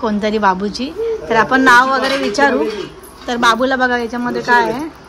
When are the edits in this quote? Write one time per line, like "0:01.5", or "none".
none